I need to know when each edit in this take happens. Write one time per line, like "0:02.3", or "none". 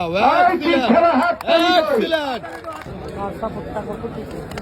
0:02.9